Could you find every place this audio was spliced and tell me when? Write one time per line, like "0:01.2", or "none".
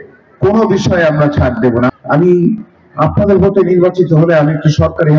0:01.9